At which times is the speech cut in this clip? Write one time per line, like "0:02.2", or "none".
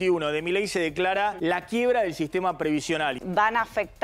0:01.4
0:03.2